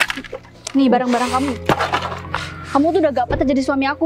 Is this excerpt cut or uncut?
uncut